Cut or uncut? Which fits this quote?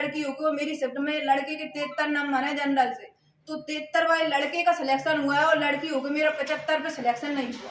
uncut